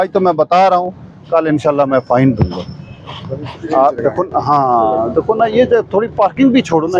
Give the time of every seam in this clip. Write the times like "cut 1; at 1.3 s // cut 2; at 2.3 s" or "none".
none